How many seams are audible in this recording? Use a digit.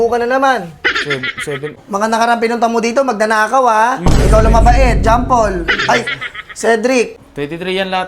2